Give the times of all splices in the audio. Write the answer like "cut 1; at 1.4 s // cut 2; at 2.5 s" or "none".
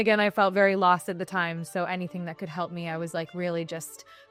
none